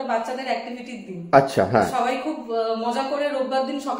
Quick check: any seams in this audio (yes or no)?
no